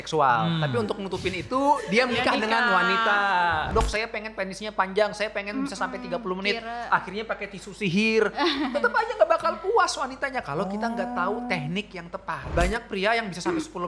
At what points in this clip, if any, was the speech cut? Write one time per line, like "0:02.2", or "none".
0:03.7
0:12.5